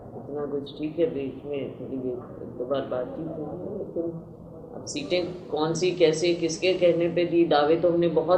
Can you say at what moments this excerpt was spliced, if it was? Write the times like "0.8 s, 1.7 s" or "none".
none